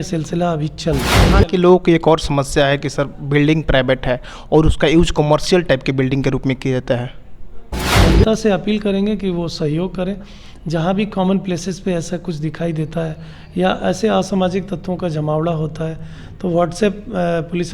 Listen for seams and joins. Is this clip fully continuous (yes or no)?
no